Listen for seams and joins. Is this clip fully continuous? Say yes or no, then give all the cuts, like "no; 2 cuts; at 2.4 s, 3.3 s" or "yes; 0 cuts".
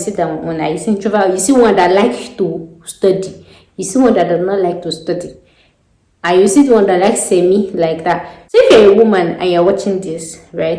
no; 1 cut; at 8.3 s